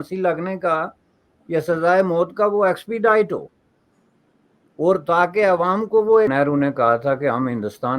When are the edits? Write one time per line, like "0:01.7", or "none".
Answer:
0:06.3